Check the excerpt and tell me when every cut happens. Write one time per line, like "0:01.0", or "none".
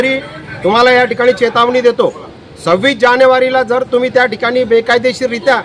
none